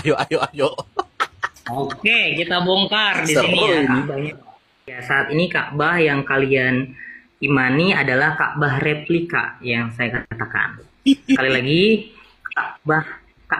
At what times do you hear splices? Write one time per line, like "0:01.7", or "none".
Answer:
0:05.0